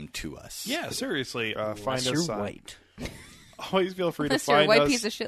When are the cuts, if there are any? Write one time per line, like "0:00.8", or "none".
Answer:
0:01.5